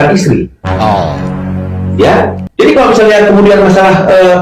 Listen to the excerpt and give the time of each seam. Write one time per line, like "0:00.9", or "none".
0:02.4